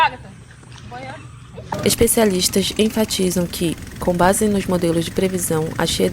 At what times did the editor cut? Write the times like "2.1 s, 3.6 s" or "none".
1.6 s